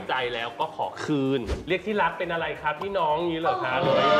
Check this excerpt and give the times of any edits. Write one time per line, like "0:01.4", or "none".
0:01.5